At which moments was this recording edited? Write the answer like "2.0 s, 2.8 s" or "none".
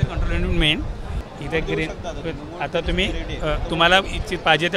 1.2 s